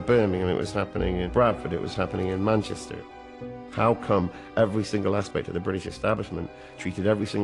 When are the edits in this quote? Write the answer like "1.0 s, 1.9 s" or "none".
1.2 s, 3.4 s

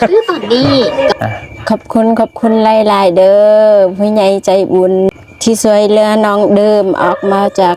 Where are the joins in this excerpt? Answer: 1.1 s, 5.1 s

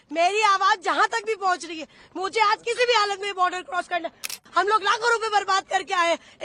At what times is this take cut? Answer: 4.3 s

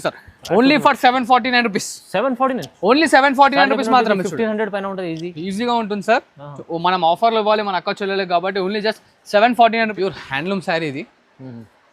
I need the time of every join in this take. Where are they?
9.9 s

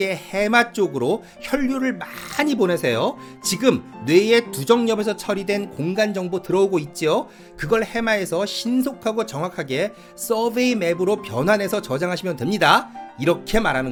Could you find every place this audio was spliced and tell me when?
none

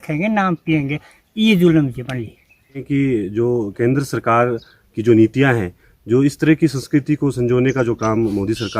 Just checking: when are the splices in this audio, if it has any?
2.8 s

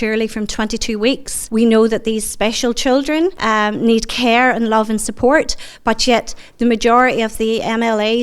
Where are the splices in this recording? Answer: 1.3 s, 3.4 s

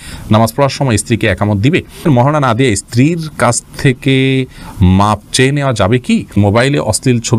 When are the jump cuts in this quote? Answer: 2.1 s, 6.3 s

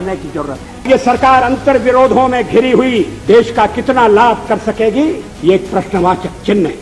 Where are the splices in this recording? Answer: 0.9 s, 3.1 s, 5.3 s

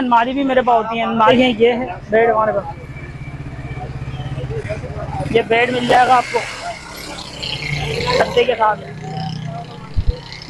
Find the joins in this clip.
1.3 s

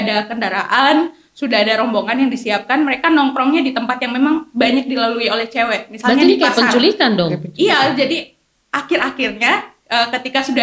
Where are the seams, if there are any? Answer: none

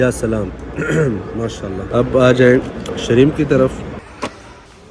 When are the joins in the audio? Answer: 1.8 s, 4.0 s

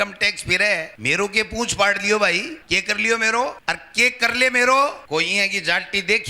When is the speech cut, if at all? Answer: 0.9 s, 2.6 s, 3.6 s, 5.0 s

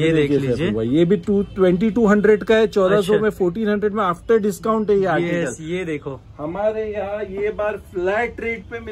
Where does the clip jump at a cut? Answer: none

